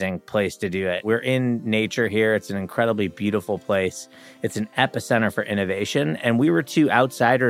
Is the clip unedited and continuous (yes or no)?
no